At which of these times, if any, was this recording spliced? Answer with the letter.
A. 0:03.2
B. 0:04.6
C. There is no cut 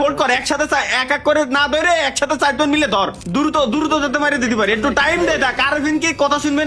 A